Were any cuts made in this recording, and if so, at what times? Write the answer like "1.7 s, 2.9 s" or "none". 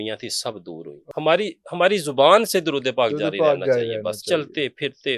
1.0 s